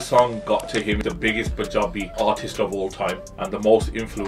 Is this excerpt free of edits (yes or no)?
no